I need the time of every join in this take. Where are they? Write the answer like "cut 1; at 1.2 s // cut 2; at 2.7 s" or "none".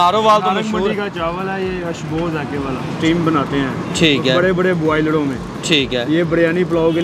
cut 1; at 3.0 s